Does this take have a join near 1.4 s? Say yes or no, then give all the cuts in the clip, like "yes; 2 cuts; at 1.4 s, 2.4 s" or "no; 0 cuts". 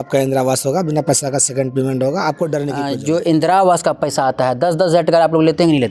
no; 1 cut; at 2.9 s